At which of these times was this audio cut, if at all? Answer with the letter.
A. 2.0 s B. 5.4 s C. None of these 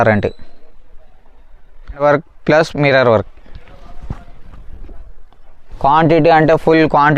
A